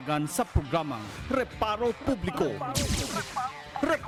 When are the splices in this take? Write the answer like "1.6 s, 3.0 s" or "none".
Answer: none